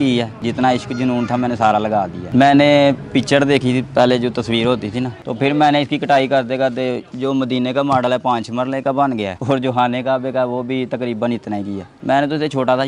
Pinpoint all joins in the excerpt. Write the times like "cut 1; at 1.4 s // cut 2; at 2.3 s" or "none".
cut 1; at 5.2 s // cut 2; at 11.9 s

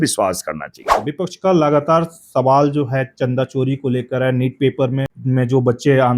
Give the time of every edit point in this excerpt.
cut 1; at 1.0 s // cut 2; at 5.1 s

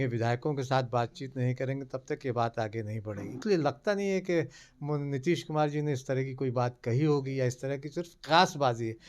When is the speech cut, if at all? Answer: cut 1; at 3.4 s

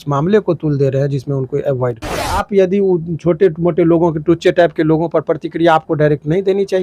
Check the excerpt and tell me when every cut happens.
cut 1; at 2.5 s

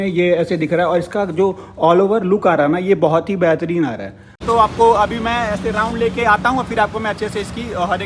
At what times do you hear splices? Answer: cut 1; at 4.4 s

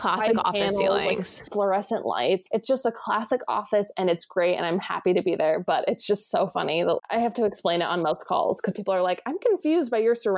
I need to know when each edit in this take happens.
cut 1; at 1.5 s // cut 2; at 2.4 s

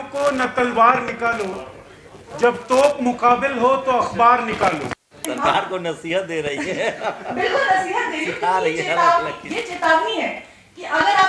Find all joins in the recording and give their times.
cut 1; at 5.3 s

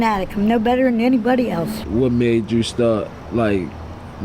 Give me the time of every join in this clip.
cut 1; at 1.8 s // cut 2; at 3.2 s

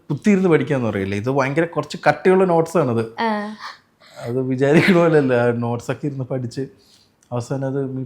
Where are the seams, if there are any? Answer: none

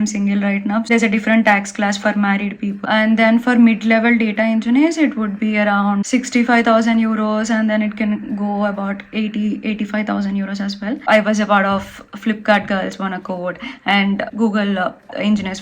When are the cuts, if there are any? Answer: cut 1; at 0.8 s // cut 2; at 2.8 s // cut 3; at 6.1 s // cut 4; at 11.0 s // cut 5; at 14.3 s

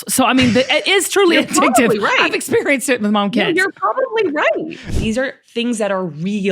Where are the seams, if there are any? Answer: cut 1; at 4.9 s

